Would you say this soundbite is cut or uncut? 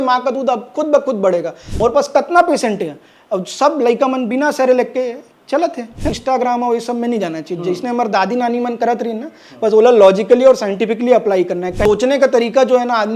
cut